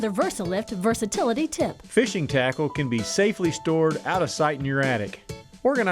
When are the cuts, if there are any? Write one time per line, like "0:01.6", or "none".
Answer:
0:01.8